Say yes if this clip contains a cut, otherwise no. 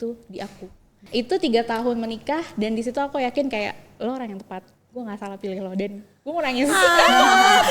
yes